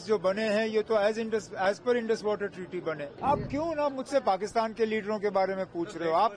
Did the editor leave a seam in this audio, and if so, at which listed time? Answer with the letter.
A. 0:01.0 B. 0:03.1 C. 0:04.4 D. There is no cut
B